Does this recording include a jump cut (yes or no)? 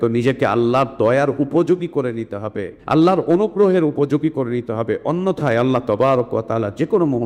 yes